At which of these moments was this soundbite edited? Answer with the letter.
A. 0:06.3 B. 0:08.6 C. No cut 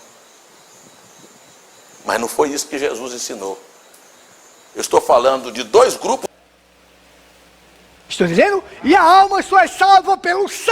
A